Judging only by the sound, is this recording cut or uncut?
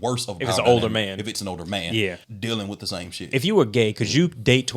cut